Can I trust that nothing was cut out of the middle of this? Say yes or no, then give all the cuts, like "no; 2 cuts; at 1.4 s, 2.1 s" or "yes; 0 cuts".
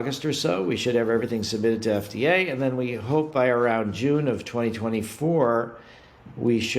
yes; 0 cuts